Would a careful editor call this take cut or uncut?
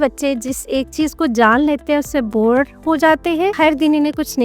cut